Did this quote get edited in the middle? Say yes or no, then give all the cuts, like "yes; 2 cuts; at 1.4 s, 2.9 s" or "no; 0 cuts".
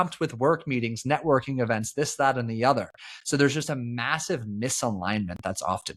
no; 0 cuts